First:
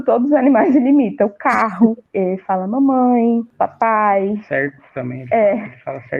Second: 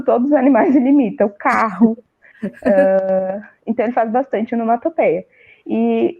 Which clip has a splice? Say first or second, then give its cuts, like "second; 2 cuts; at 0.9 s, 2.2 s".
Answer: first; 2 cuts; at 2.1 s, 3.5 s